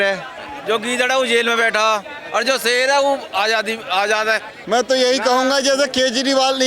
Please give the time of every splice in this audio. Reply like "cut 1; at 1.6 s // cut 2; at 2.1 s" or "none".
cut 1; at 4.6 s